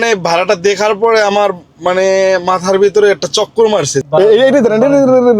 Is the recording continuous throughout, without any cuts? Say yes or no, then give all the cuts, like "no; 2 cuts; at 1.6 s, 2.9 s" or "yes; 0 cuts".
no; 1 cut; at 4.0 s